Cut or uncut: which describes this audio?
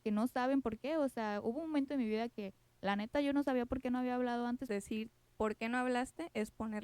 cut